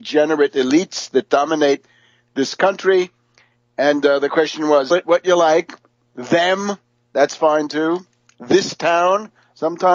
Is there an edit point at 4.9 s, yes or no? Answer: no